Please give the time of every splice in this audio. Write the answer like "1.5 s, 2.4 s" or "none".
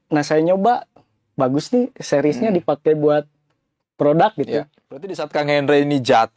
5.2 s